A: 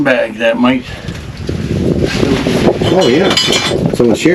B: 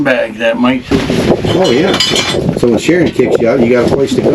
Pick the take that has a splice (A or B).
B